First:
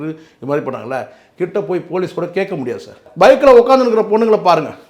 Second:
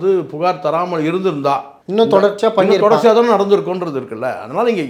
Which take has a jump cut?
first; 1 cut; at 3.0 s

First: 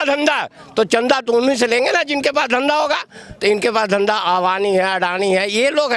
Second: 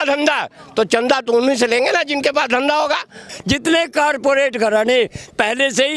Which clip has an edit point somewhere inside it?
second; 1 cut; at 3.3 s

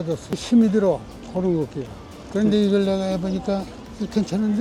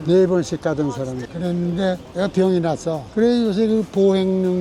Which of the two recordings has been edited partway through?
second; 1 cut; at 3.0 s

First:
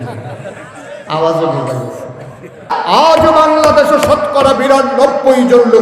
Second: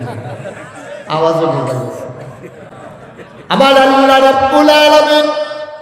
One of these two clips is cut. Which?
first; 1 cut; at 2.7 s

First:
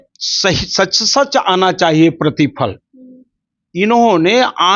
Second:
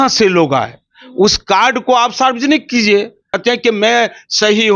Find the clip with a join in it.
second; 1 cut; at 3.2 s

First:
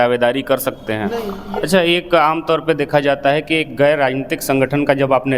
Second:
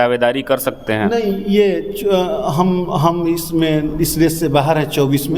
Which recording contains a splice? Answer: first; 1 cut; at 1.3 s

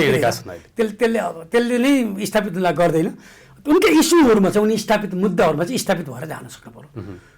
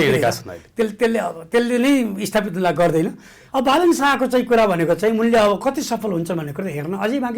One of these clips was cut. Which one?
second; 1 cut; at 3.3 s

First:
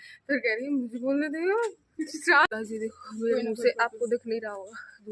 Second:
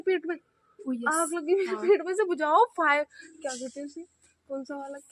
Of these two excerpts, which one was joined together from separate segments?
first; 1 cut; at 2.5 s

